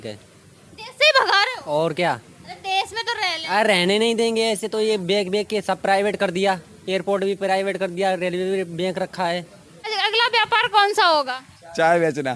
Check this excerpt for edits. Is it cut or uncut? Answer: cut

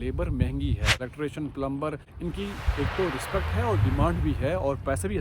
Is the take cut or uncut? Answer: cut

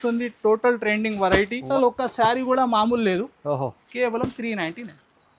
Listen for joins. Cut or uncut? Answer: cut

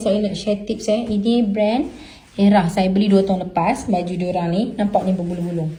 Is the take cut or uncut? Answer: uncut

